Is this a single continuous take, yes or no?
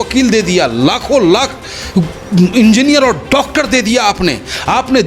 yes